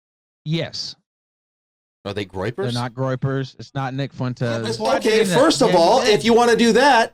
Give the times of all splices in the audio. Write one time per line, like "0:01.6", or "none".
0:04.7